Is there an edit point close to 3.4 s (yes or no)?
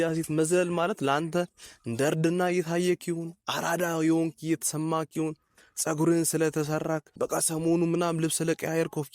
no